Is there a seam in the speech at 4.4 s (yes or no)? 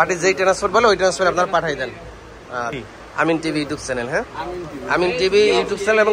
no